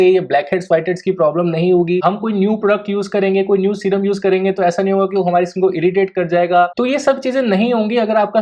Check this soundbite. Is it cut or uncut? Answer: cut